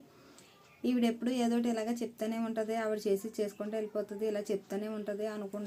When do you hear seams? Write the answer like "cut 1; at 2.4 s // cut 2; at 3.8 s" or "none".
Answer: none